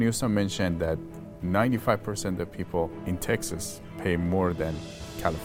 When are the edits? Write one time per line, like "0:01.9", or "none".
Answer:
0:03.0